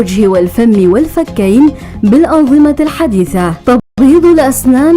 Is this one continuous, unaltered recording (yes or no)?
no